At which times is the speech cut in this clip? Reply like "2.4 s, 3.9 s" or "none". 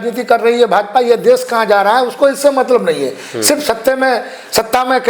none